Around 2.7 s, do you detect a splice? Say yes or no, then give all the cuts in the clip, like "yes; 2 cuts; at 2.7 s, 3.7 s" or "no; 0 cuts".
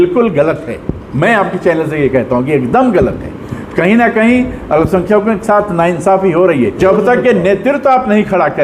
no; 1 cut; at 6.8 s